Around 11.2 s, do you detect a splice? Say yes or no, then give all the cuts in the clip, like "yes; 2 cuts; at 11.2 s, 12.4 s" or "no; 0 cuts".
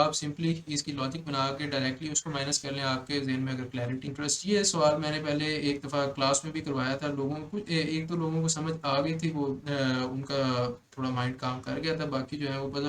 no; 1 cut; at 4.1 s